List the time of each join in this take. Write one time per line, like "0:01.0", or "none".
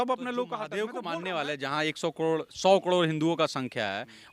0:00.9